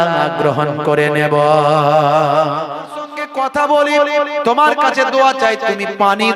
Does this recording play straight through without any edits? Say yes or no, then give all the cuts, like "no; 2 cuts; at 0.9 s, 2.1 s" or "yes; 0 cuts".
no; 1 cut; at 3.2 s